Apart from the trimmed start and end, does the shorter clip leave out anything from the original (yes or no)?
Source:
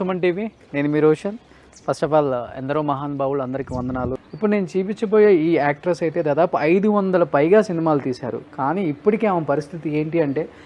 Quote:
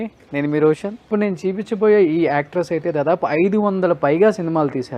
yes